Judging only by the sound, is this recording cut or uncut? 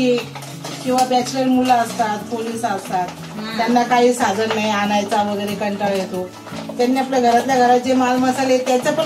uncut